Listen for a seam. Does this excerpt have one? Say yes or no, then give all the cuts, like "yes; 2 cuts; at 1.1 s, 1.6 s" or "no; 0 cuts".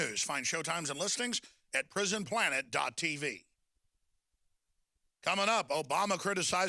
no; 0 cuts